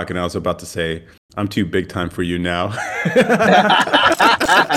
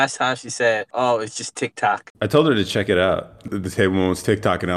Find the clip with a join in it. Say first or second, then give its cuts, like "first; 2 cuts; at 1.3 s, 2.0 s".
second; 3 cuts; at 0.9 s, 2.1 s, 3.5 s